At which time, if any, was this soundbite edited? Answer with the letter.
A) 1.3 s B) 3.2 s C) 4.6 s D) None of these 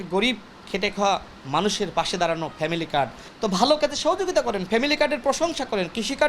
B